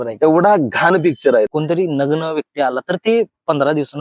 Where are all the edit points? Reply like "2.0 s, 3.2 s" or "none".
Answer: 1.5 s